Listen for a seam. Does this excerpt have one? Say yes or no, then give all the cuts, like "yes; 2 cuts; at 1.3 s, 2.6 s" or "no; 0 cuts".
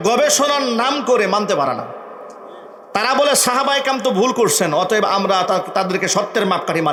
no; 0 cuts